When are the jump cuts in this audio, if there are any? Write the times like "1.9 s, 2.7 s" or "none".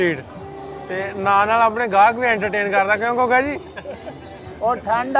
none